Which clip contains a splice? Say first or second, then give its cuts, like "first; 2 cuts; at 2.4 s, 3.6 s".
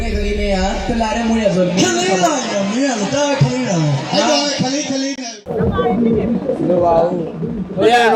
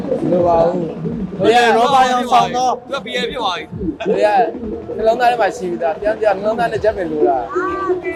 first; 1 cut; at 5.4 s